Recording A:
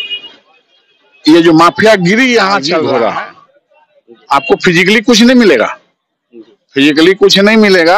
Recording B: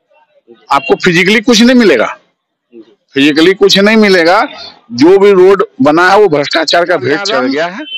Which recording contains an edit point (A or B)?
A